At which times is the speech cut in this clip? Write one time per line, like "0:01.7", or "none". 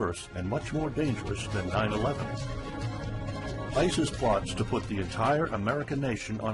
0:04.1